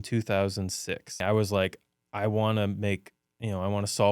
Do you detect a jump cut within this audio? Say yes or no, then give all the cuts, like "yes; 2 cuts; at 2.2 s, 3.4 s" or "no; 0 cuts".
yes; 1 cut; at 1.2 s